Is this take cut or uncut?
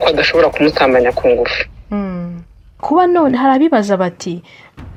uncut